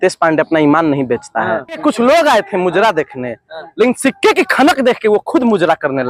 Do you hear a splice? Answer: yes; 1 cut; at 1.7 s

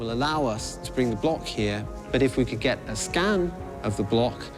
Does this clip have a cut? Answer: no; 0 cuts

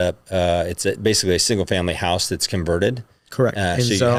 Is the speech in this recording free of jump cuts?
yes; 0 cuts

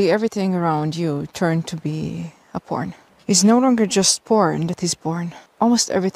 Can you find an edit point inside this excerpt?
no; 0 cuts

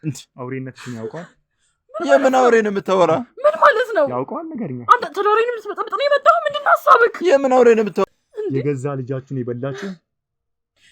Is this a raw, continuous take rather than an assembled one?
no; 1 cut; at 8.1 s

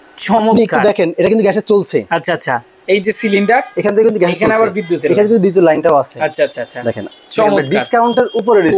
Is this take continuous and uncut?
no; 2 cuts; at 2.8 s, 7.0 s

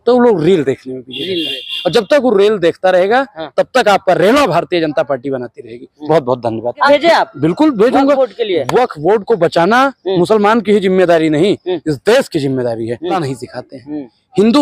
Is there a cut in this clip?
yes; 2 cuts; at 6.9 s, 13.2 s

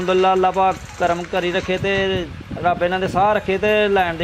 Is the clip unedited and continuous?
yes; 0 cuts

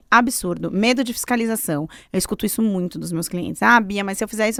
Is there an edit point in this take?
no; 0 cuts

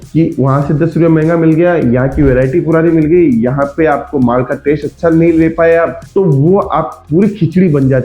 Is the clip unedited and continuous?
yes; 0 cuts

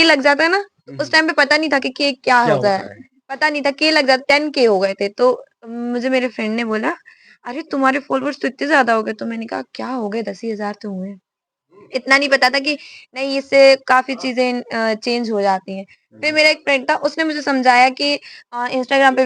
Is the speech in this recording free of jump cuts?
yes; 0 cuts

